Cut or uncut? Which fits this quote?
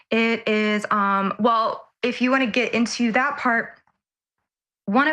uncut